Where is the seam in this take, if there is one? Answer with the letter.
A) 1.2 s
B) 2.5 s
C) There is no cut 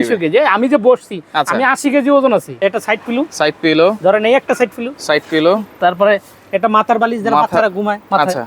B